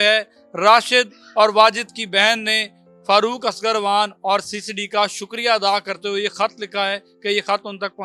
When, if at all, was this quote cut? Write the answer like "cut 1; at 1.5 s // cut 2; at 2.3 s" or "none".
none